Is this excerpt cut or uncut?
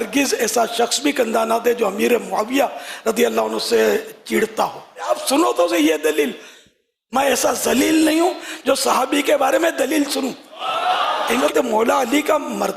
cut